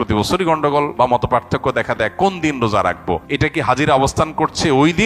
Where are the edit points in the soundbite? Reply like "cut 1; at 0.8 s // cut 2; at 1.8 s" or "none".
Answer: cut 1; at 0.9 s // cut 2; at 3.3 s